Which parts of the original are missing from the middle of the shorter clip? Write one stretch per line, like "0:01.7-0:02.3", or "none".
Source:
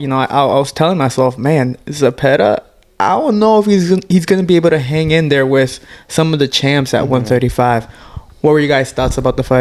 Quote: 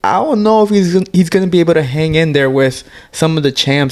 none